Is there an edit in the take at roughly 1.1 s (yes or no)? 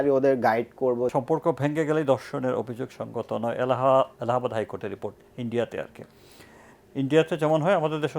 yes